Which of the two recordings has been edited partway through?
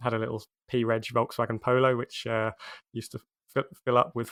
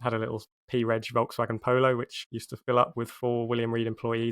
second; 1 cut; at 2.2 s

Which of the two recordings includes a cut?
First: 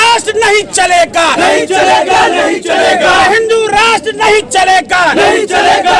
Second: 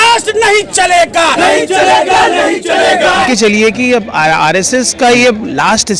second; 1 cut; at 3.3 s

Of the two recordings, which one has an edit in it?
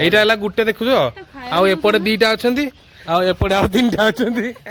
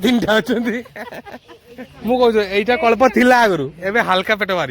second; 1 cut; at 2.0 s

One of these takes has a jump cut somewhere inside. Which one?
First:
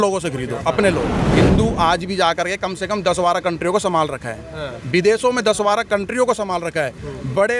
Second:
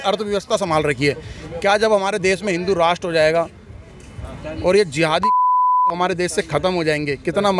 first; 1 cut; at 1.3 s

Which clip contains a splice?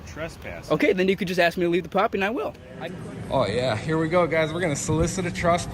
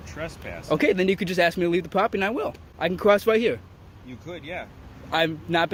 first; 1 cut; at 2.7 s

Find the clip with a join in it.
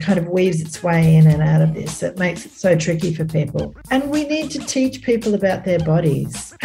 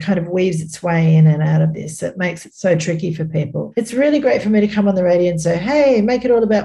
first; 1 cut; at 3.7 s

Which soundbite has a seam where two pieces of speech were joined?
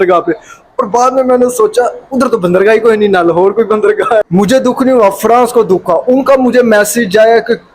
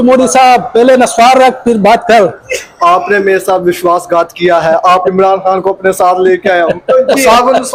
first; 1 cut; at 4.2 s

